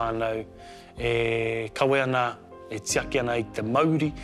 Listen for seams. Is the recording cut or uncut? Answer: uncut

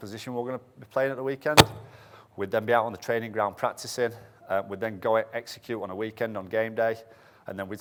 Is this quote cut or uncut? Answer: uncut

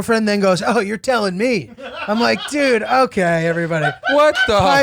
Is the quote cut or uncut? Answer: uncut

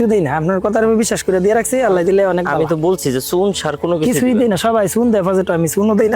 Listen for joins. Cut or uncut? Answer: uncut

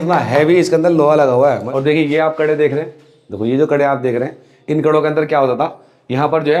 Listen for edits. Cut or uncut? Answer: cut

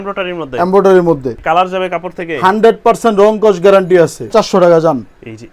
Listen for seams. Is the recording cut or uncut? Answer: cut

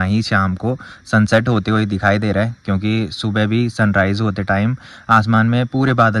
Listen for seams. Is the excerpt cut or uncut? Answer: uncut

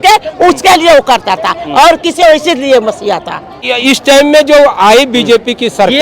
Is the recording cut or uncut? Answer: cut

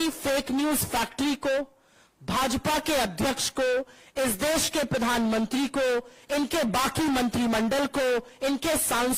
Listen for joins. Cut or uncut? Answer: uncut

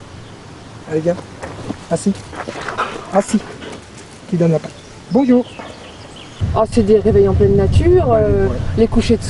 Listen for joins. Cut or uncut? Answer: cut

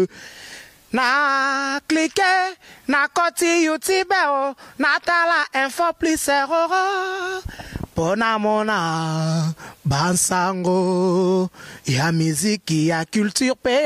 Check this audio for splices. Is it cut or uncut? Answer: uncut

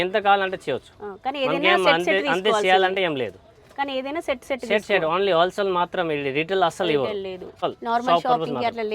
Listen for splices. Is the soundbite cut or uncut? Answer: cut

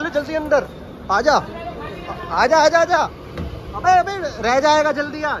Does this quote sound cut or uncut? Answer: uncut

